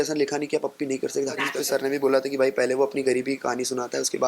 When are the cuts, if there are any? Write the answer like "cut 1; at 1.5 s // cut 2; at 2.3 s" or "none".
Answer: cut 1; at 1.4 s